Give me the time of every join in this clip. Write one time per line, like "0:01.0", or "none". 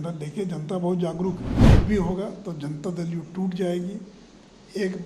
0:01.5